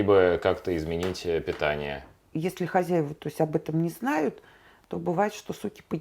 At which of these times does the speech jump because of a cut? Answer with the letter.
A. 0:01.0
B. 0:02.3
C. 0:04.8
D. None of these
B